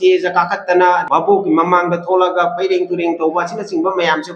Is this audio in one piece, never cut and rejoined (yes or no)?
no